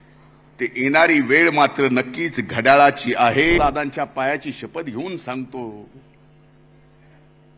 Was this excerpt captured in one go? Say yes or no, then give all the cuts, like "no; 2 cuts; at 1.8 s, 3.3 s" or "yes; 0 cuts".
no; 1 cut; at 3.6 s